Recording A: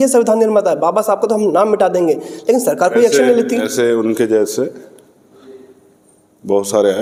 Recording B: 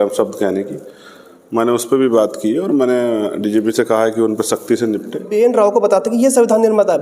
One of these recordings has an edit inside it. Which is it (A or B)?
B